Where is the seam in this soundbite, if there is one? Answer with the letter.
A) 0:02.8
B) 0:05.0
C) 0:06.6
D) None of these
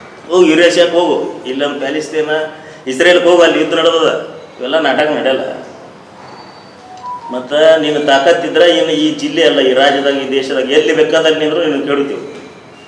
B